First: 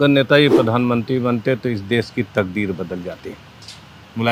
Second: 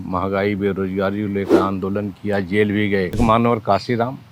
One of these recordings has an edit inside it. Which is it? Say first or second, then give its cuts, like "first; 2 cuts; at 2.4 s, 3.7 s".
second; 1 cut; at 3.2 s